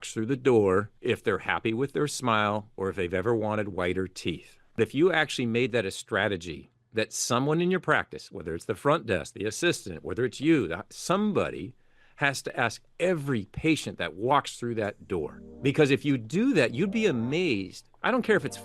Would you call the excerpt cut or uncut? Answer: cut